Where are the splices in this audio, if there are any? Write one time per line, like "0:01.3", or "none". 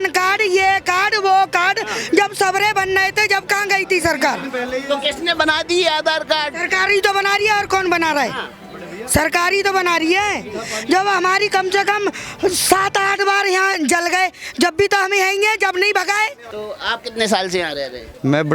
0:16.6